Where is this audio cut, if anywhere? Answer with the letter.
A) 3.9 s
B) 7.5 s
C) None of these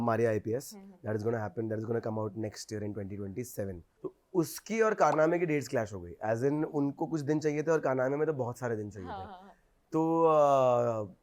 A